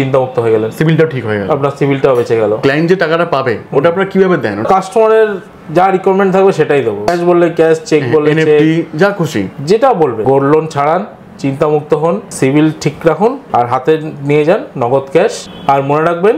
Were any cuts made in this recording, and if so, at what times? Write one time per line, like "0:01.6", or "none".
0:02.6
0:04.6
0:07.1
0:10.2
0:12.3
0:13.4
0:15.5